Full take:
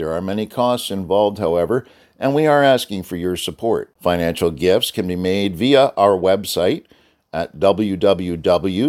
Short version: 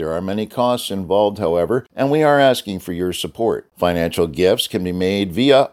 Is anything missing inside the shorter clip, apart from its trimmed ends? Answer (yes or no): yes